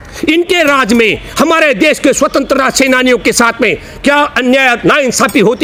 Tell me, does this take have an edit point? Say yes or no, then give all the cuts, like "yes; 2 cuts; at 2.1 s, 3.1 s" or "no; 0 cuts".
no; 0 cuts